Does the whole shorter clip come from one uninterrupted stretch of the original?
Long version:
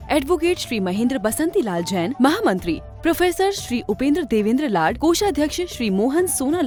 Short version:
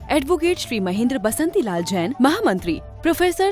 yes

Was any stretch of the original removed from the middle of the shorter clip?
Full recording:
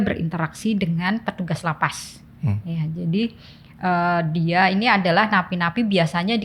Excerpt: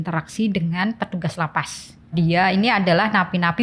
yes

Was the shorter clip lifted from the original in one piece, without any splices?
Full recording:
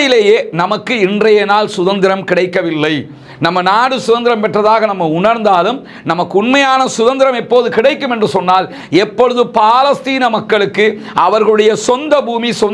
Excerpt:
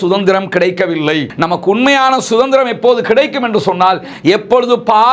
no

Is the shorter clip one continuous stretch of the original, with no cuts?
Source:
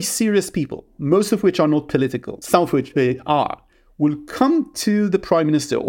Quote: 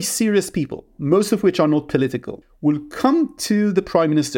no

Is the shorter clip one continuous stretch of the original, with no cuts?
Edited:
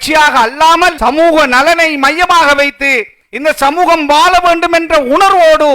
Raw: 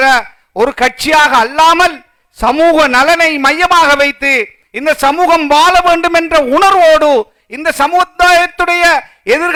no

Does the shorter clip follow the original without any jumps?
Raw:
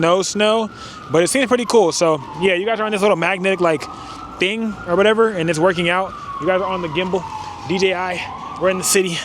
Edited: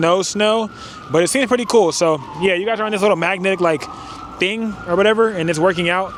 yes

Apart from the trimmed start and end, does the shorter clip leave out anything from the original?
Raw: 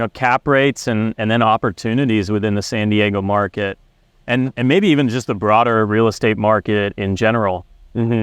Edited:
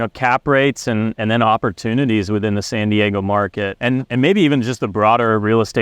yes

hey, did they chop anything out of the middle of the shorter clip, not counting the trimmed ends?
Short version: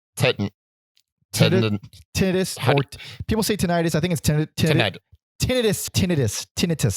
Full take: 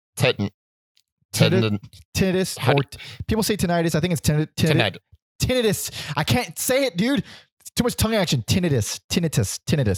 yes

